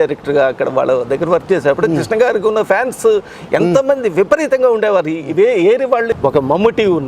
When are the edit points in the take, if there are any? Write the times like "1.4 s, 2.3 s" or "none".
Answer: 6.1 s